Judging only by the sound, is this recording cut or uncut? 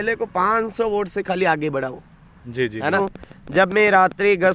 cut